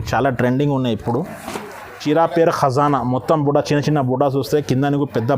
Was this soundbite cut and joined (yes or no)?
yes